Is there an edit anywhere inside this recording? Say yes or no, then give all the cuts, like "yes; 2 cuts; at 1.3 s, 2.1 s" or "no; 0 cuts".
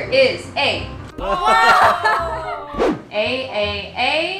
yes; 1 cut; at 2.8 s